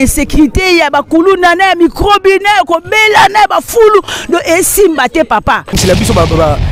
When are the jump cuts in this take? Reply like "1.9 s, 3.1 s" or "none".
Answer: 5.8 s

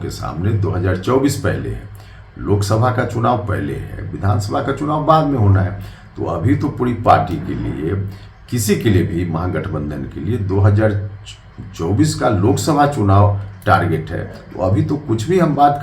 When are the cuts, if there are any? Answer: none

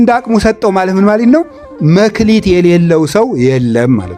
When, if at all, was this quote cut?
none

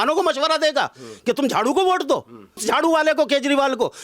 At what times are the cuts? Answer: 2.6 s

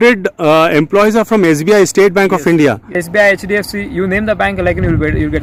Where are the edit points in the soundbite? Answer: none

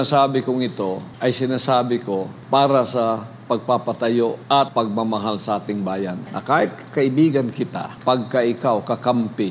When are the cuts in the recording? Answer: 1.1 s, 2.4 s, 4.6 s, 6.3 s, 7.9 s

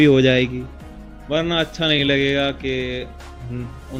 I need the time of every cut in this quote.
none

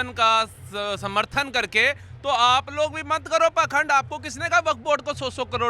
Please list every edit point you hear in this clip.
none

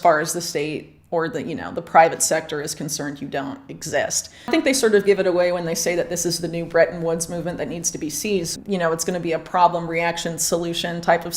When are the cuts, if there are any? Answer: 4.5 s, 8.5 s

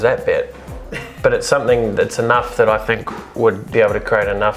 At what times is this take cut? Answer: 3.6 s

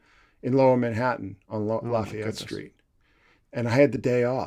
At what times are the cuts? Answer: none

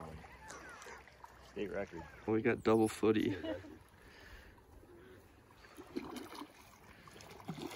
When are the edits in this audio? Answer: none

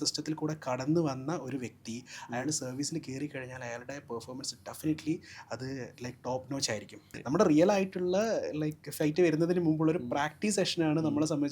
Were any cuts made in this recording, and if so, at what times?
7.1 s

